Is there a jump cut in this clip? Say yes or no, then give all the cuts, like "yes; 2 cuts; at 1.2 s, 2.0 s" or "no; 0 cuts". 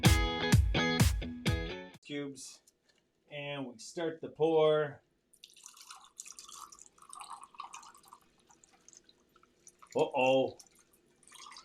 yes; 1 cut; at 1.9 s